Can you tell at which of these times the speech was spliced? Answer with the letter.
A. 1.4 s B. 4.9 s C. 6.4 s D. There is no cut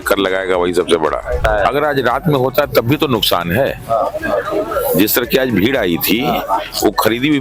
A